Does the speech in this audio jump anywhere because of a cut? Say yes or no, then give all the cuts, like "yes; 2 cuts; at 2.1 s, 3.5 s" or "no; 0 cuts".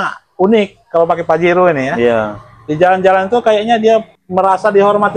no; 0 cuts